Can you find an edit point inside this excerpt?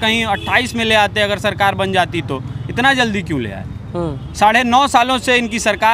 no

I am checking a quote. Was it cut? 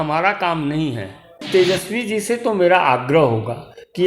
yes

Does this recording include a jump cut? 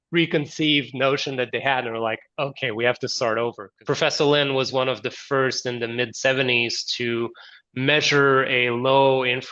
yes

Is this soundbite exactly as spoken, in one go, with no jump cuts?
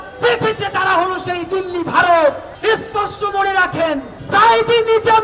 no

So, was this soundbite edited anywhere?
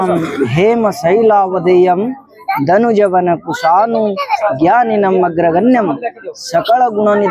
no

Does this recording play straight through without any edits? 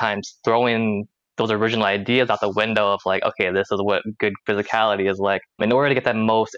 no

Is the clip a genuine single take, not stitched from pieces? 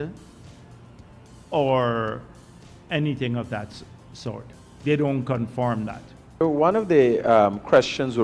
no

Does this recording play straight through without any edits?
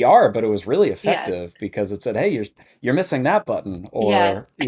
yes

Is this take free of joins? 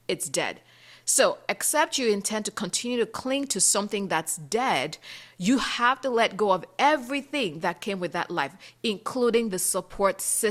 yes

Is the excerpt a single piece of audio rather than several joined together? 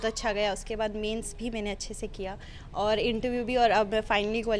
yes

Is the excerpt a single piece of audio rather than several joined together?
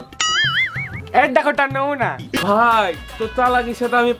no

